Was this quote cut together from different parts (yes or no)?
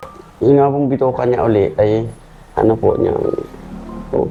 no